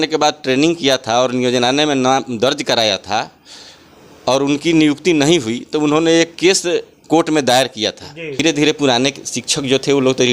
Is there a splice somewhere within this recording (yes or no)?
yes